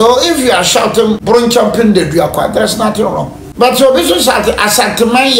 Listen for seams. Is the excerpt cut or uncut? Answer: cut